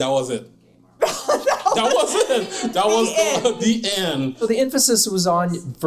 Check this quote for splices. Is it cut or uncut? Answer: cut